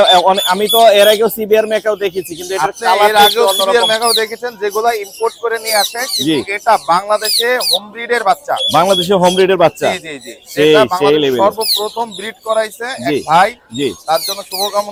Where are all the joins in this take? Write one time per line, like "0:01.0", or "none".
none